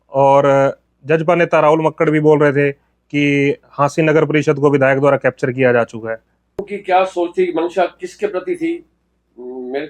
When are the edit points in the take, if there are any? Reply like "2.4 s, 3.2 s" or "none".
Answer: 6.7 s